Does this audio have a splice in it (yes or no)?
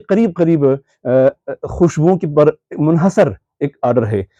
no